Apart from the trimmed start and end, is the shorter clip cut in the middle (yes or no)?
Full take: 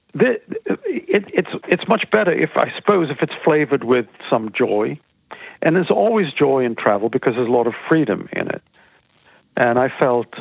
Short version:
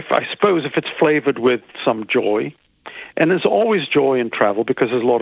no